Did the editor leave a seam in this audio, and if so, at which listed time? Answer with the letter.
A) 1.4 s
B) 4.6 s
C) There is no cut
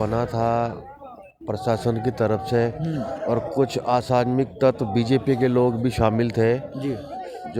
C